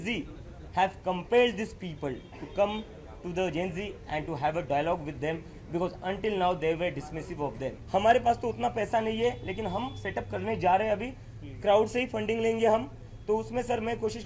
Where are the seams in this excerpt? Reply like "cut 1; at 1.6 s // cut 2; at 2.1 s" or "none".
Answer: cut 1; at 7.7 s